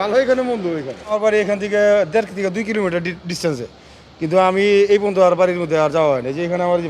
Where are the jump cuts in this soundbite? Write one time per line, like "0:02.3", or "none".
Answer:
0:01.2